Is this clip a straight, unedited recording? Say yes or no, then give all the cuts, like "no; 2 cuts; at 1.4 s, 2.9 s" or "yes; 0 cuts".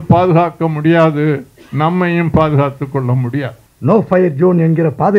no; 1 cut; at 3.6 s